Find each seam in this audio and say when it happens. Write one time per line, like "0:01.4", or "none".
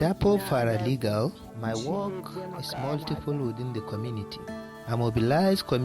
0:01.4
0:04.8